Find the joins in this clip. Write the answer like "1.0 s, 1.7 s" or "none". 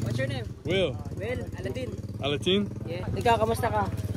none